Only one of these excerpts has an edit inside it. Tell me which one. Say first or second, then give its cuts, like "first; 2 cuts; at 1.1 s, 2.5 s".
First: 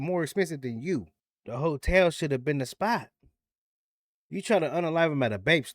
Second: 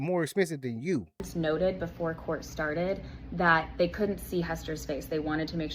first; 1 cut; at 1.2 s